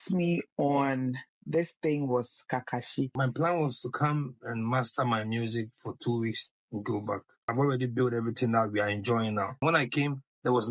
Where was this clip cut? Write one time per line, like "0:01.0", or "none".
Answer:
0:03.1
0:07.5
0:09.6